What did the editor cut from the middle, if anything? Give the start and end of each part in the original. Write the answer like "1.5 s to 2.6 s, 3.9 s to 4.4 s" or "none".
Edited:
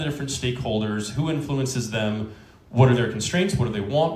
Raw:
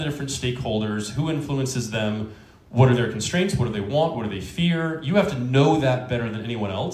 none